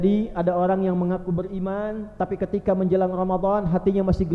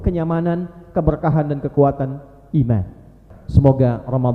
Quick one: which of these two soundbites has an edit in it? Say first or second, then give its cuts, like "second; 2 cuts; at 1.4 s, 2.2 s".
second; 1 cut; at 3.4 s